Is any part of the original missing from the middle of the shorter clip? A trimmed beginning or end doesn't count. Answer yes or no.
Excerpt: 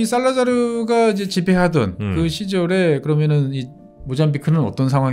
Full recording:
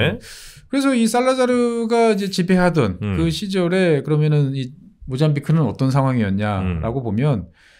no